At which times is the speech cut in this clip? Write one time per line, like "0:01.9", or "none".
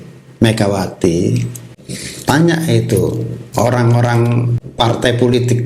0:04.6

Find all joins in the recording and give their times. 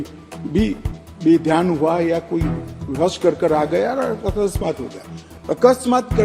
none

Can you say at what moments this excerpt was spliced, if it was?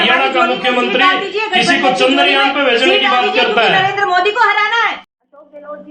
0:05.0

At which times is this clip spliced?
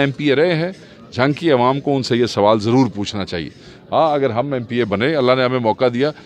none

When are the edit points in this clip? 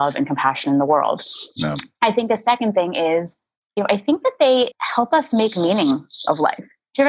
0:04.7

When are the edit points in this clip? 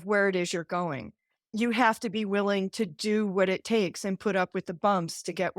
0:01.5

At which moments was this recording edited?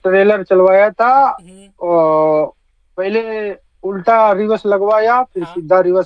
none

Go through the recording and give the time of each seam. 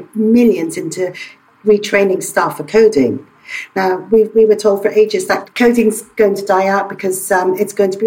0:05.4

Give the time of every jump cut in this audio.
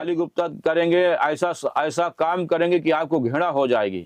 none

